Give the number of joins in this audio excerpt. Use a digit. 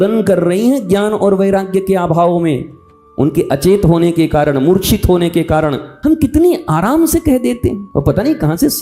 2